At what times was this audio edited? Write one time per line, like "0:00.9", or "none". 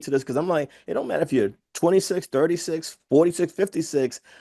none